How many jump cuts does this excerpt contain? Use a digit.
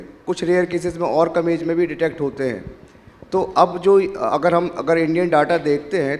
0